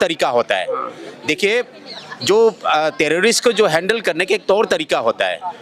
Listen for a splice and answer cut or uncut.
uncut